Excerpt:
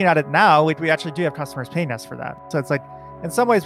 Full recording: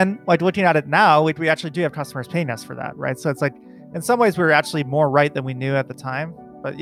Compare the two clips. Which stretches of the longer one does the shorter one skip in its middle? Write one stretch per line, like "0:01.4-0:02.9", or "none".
0:03.0-0:03.1